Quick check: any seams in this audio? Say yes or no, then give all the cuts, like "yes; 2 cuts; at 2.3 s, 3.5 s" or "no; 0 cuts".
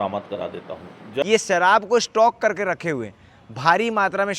yes; 1 cut; at 1.2 s